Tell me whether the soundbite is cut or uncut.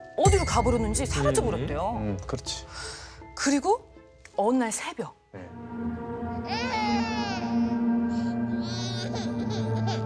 cut